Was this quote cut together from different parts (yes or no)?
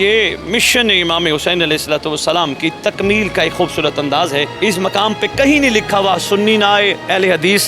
yes